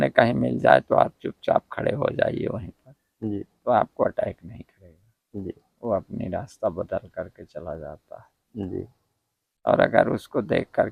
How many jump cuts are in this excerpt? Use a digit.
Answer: 0